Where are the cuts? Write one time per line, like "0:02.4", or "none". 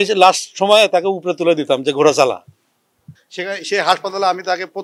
0:03.1